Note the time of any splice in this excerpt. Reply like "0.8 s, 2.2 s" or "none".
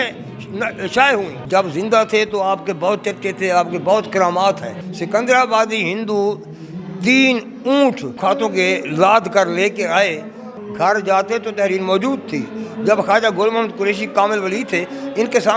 1.4 s, 4.7 s, 10.5 s